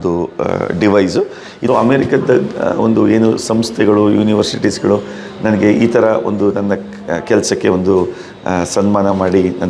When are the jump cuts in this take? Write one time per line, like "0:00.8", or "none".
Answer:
0:01.5